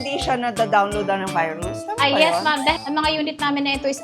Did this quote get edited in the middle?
yes; 1 cut; at 2.8 s

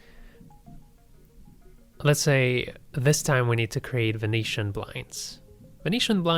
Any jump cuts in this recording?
no; 0 cuts

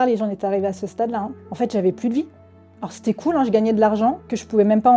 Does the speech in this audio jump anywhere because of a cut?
yes; 1 cut; at 1.4 s

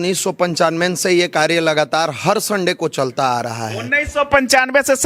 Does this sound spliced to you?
no; 0 cuts

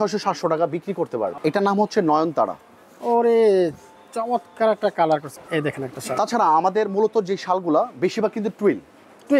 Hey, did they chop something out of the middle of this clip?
yes; 2 cuts; at 1.4 s, 5.3 s

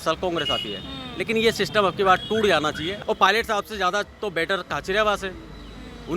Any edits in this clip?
yes; 1 cut; at 3.0 s

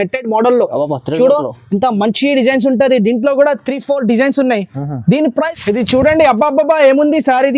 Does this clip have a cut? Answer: yes; 1 cut; at 5.3 s

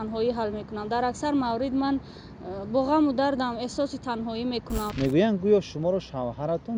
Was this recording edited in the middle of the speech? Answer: yes; 1 cut; at 4.9 s

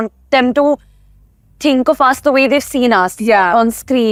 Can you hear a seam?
no; 0 cuts

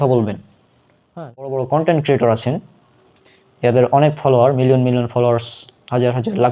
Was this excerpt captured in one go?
no; 1 cut; at 1.6 s

